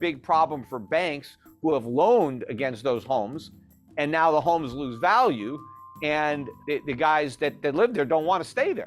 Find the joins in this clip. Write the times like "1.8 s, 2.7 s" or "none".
6.5 s